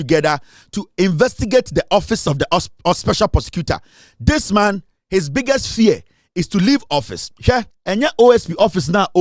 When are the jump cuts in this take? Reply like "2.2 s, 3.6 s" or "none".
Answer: 7.7 s